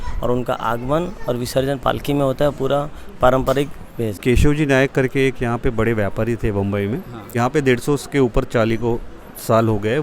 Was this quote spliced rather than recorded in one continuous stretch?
yes; 2 cuts; at 4.2 s, 7.3 s

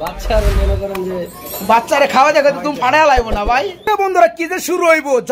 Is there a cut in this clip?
yes; 1 cut; at 3.9 s

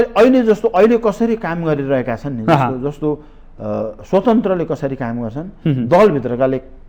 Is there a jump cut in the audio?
no; 0 cuts

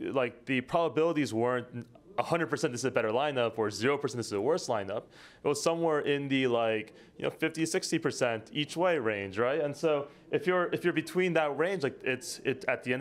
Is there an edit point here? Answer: no; 0 cuts

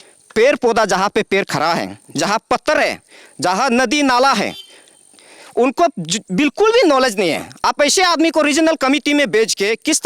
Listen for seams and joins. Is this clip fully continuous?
yes; 0 cuts

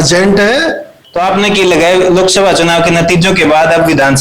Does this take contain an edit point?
yes; 1 cut; at 1.1 s

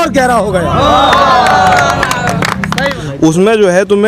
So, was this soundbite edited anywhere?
yes; 1 cut; at 2.7 s

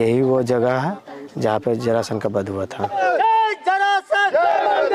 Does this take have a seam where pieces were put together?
yes; 1 cut; at 2.9 s

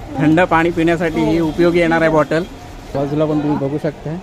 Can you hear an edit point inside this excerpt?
yes; 1 cut; at 3.0 s

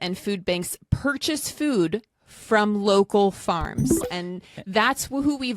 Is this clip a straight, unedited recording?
no; 1 cut; at 4.1 s

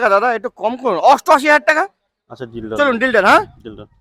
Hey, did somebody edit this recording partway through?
no; 0 cuts

